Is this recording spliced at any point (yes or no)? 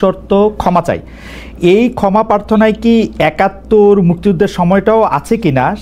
no